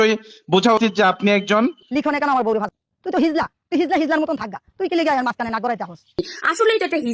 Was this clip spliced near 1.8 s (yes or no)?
yes